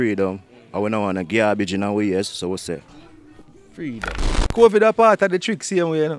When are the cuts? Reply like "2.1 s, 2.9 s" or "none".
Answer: 4.3 s